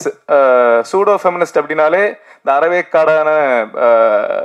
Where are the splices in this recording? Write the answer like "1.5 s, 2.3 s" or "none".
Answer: none